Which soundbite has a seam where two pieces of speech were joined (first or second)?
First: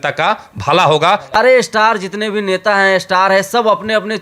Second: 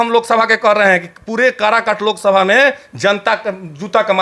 first